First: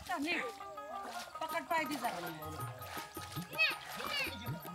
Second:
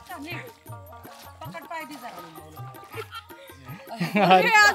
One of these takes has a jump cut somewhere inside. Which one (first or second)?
second